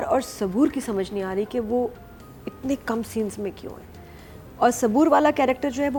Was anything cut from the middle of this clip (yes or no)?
no